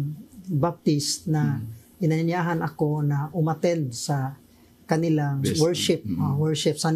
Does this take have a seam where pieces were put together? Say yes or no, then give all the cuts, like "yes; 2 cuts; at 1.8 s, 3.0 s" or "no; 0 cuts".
yes; 1 cut; at 5.4 s